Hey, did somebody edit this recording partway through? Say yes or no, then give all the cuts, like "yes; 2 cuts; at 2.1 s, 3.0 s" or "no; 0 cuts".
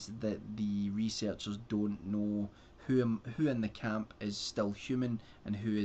no; 0 cuts